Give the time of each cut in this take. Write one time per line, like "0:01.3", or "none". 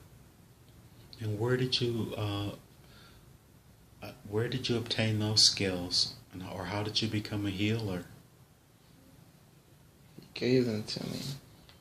none